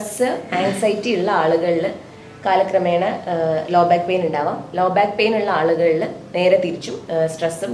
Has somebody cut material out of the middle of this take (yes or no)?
no